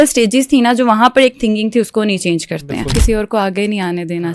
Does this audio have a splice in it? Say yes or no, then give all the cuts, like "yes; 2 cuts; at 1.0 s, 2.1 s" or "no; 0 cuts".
yes; 1 cut; at 2.9 s